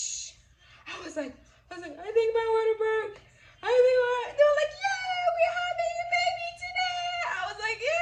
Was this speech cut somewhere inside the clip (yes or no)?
no